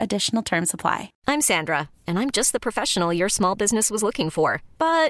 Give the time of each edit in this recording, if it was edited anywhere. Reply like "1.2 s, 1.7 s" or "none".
1.1 s